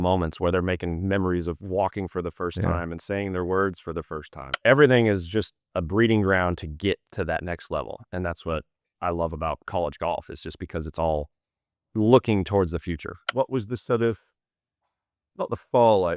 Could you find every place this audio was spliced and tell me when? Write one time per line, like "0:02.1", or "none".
0:04.5
0:13.2